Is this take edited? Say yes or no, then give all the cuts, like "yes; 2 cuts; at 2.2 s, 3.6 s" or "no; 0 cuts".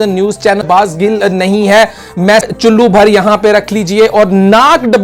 yes; 2 cuts; at 0.8 s, 2.4 s